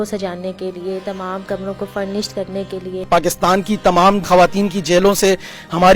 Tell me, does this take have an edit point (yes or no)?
yes